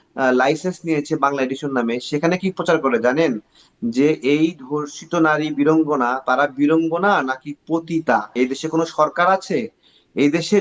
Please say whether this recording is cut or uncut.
cut